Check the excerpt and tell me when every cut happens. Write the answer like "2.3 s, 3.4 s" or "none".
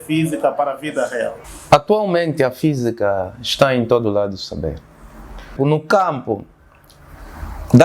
1.5 s, 5.5 s